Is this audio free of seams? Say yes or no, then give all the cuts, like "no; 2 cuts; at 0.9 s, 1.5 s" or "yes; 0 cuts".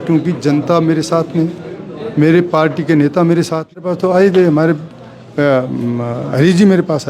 no; 1 cut; at 3.8 s